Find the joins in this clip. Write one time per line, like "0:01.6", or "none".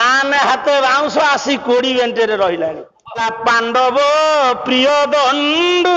0:03.2